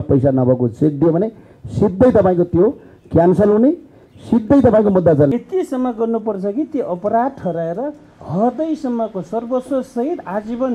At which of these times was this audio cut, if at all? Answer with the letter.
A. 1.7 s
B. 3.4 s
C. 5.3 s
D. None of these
C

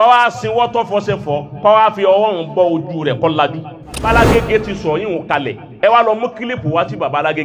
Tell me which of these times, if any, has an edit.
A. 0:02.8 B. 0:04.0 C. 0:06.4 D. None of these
B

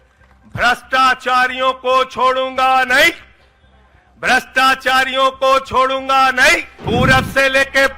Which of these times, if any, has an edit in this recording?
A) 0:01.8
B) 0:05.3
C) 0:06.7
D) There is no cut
C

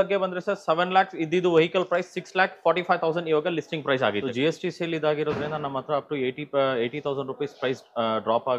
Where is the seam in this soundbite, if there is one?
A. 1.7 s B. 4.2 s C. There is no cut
B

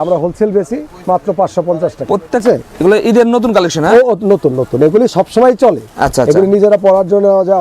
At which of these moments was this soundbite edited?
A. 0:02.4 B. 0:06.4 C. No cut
A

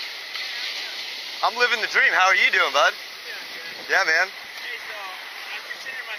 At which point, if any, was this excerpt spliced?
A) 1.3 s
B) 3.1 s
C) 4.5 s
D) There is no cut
D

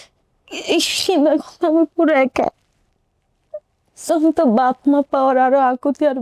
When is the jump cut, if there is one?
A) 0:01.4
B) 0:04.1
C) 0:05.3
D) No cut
B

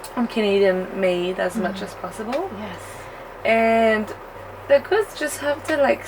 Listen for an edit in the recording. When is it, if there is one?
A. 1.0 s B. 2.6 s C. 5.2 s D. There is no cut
D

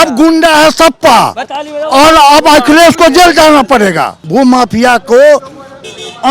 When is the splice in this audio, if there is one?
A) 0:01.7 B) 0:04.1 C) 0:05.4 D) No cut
B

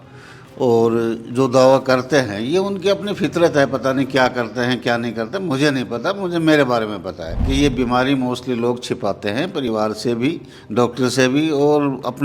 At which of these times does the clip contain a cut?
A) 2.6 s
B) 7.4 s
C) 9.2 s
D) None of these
B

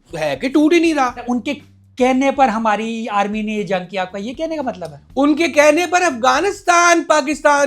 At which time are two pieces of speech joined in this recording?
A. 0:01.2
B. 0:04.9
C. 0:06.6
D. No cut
A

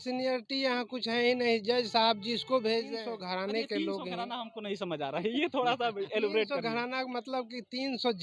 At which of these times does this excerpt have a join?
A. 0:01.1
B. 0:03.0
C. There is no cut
B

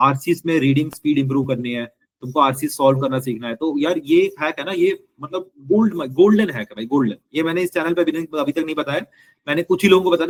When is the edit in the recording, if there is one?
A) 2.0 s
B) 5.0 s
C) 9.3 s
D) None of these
D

